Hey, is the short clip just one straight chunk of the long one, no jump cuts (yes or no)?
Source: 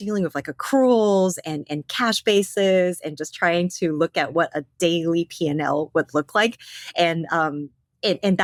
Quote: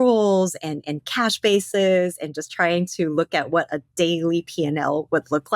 yes